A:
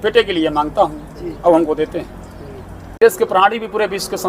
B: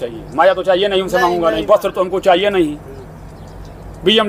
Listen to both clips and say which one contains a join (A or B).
A